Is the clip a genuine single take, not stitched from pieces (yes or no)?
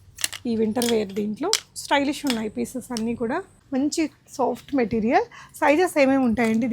no